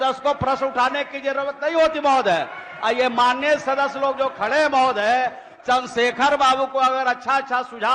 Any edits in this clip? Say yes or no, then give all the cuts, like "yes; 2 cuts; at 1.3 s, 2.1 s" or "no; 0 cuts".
no; 0 cuts